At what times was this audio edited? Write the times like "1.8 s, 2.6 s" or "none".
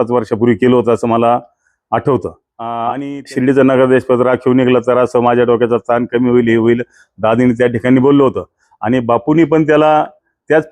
2.8 s